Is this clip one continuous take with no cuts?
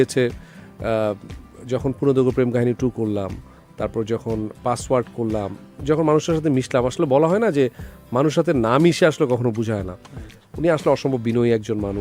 yes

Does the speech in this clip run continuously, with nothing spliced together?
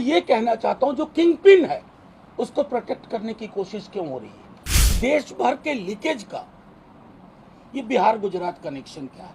no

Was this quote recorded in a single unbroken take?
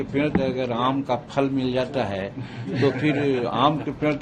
yes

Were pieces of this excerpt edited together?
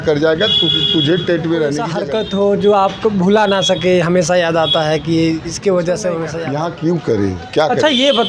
yes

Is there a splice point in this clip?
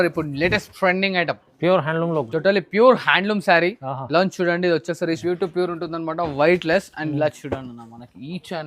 yes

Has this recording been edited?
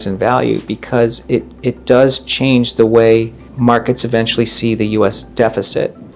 yes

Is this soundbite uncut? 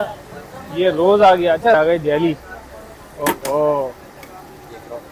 no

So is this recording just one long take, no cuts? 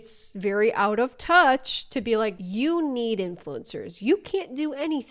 yes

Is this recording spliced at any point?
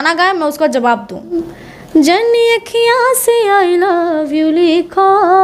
yes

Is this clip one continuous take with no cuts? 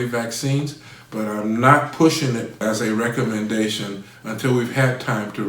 no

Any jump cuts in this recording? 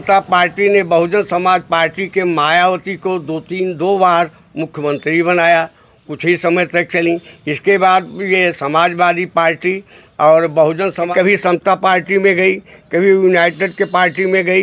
yes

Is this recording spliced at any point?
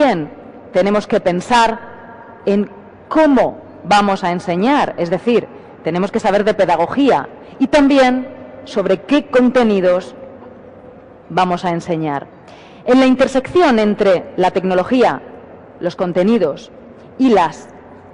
yes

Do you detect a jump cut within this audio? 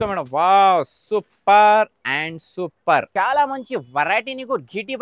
yes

